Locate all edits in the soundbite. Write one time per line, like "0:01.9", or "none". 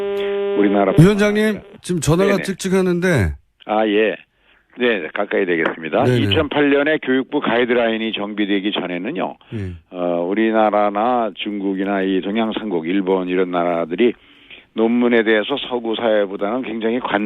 0:02.2

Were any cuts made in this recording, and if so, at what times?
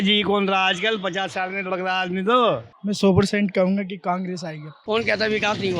0:02.7
0:04.8

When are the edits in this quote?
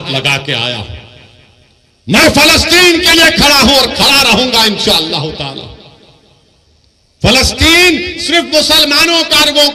none

